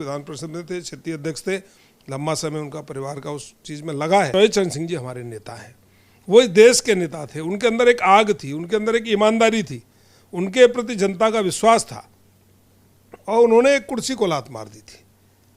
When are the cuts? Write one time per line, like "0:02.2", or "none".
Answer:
0:04.3